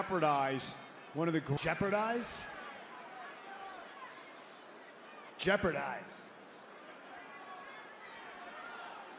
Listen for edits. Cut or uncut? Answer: uncut